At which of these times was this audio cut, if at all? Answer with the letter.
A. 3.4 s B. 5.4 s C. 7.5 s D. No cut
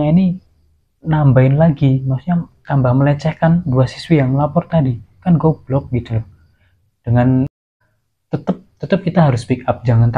C